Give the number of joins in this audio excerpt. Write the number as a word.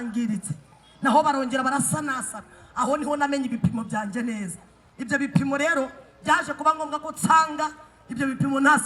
zero